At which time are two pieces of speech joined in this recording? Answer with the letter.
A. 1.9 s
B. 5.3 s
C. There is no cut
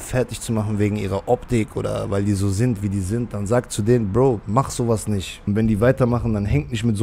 B